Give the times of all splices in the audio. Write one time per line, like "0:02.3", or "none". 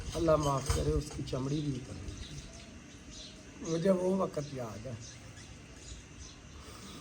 none